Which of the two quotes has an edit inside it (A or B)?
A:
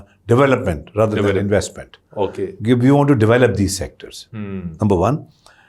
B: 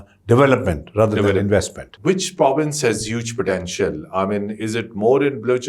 B